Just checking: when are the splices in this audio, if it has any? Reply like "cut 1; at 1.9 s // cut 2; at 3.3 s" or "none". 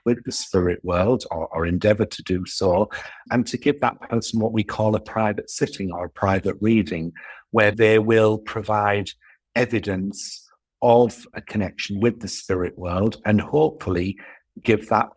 cut 1; at 3.2 s // cut 2; at 7.7 s